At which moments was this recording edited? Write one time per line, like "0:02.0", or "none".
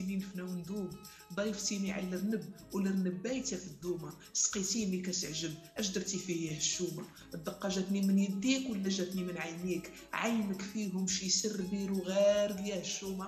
none